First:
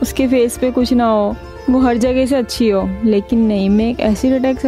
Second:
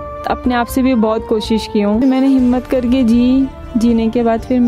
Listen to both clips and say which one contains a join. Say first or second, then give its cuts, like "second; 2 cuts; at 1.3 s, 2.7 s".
second; 1 cut; at 2.0 s